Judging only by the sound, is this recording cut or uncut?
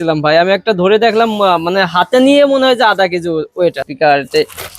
cut